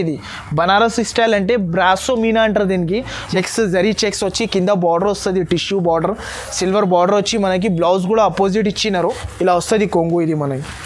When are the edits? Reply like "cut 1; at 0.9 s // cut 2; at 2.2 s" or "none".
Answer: cut 1; at 3.3 s // cut 2; at 9.0 s